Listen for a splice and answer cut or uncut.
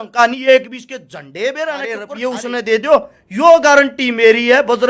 cut